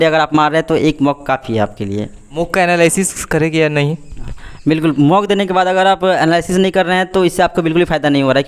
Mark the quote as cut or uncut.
uncut